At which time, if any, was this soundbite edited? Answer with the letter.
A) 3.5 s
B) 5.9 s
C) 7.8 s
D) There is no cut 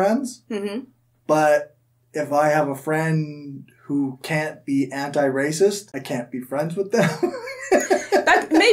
B